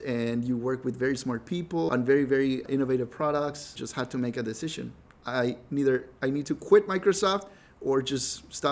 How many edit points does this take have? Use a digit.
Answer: 3